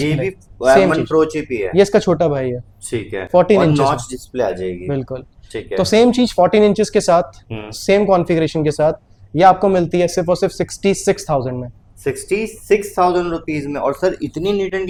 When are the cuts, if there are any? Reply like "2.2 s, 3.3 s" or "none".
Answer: none

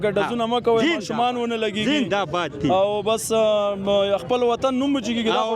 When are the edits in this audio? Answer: none

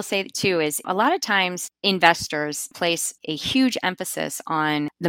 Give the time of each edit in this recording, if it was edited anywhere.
0.8 s, 3.0 s

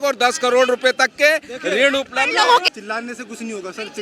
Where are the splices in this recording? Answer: 2.7 s

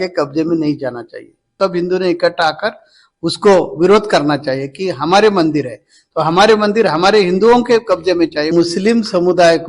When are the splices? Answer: 1.5 s, 8.5 s

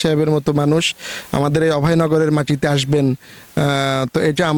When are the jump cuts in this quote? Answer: none

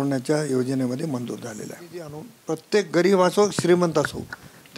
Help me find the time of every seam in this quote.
2.3 s

